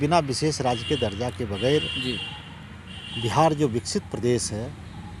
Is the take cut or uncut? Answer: uncut